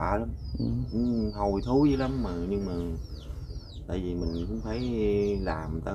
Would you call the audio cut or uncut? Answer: uncut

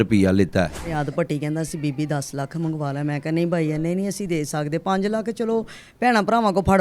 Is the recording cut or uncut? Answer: cut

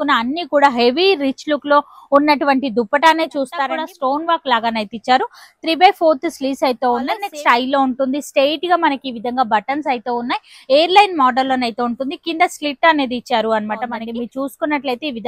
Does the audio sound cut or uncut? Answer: cut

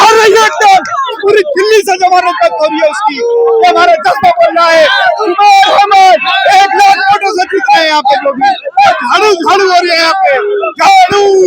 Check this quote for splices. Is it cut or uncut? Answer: uncut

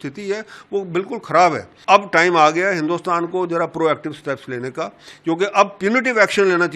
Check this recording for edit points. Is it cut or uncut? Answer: cut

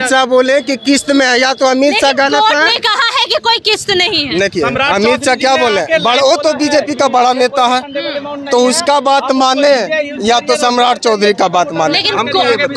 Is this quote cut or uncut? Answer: uncut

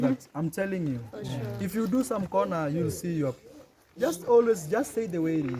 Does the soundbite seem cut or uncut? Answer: uncut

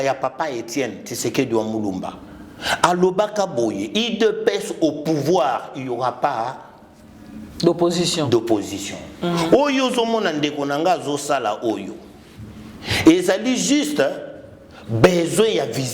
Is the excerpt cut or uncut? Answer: uncut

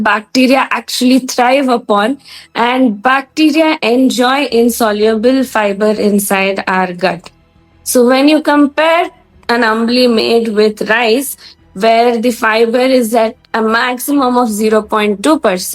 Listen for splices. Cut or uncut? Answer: uncut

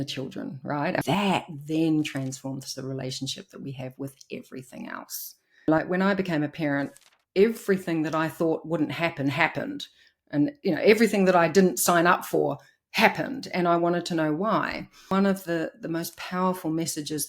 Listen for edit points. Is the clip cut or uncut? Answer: cut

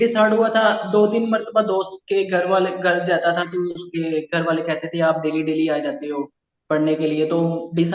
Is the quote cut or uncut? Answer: uncut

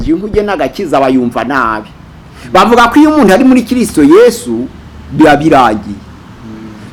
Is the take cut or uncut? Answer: uncut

